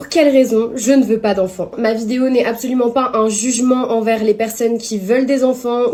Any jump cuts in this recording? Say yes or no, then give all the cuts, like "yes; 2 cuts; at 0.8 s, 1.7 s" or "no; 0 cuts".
no; 0 cuts